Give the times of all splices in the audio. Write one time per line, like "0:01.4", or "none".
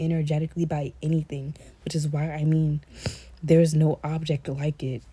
none